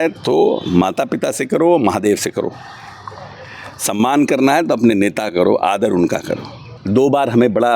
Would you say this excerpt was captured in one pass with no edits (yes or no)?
no